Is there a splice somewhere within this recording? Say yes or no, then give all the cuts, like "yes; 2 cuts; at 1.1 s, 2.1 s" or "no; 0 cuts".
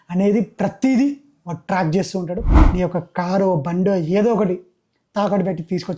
yes; 1 cut; at 2.5 s